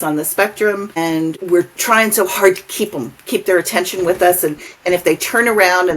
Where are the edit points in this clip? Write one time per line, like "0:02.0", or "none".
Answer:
0:01.4